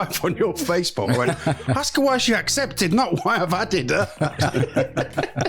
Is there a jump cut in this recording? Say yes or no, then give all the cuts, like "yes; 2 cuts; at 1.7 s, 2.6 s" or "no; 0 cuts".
yes; 1 cut; at 4.5 s